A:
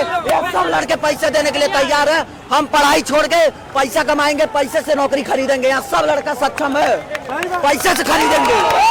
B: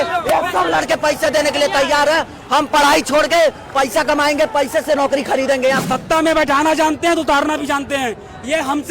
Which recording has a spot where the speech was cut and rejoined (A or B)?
B